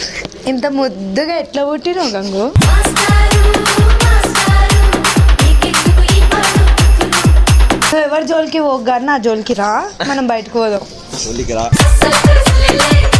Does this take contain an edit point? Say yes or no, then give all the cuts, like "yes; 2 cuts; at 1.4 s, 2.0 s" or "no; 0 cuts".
yes; 1 cut; at 7.9 s